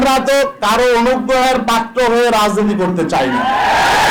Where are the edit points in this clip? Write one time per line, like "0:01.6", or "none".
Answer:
none